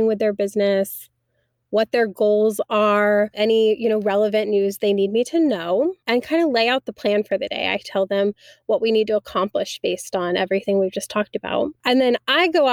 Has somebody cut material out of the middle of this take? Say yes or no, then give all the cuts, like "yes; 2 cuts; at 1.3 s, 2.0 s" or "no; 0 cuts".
yes; 3 cuts; at 3.4 s, 6.0 s, 11.8 s